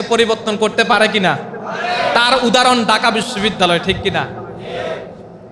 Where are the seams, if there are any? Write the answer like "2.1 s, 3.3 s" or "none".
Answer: none